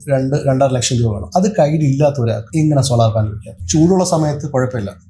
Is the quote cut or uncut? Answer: cut